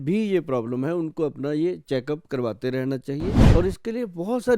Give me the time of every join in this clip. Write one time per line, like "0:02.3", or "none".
0:03.4

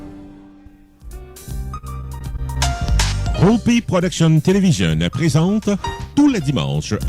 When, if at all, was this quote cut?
0:01.2

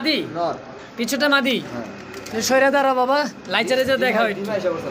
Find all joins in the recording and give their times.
none

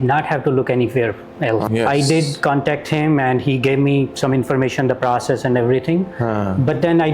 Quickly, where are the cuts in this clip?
0:01.7

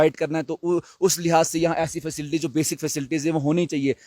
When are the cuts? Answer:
none

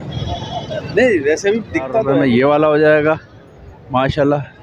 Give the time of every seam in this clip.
0:02.1

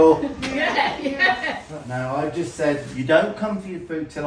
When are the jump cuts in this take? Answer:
0:01.7

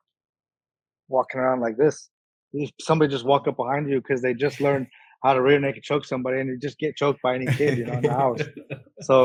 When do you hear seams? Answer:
none

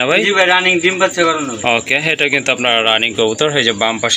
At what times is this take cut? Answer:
none

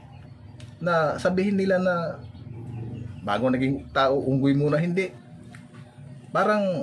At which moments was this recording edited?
0:05.2

